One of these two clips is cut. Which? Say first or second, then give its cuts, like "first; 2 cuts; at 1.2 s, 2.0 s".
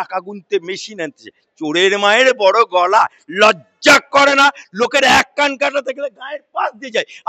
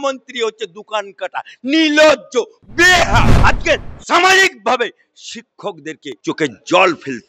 second; 2 cuts; at 3.3 s, 6.1 s